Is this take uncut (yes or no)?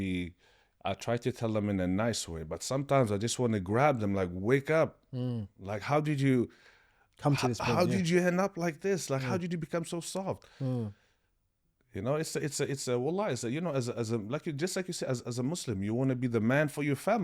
yes